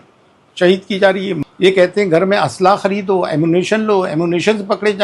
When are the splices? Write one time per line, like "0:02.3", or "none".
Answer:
0:01.3